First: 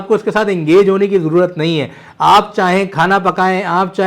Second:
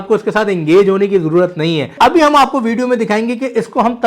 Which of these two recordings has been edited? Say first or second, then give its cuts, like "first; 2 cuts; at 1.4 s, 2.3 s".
second; 1 cut; at 1.9 s